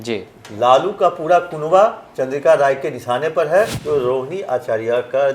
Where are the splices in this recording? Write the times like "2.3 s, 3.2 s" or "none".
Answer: 3.8 s